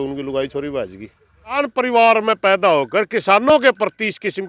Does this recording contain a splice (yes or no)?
yes